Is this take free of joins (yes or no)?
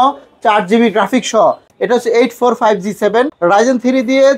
no